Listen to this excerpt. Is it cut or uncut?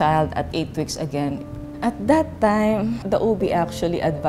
cut